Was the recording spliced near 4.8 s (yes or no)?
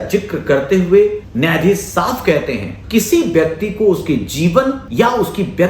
yes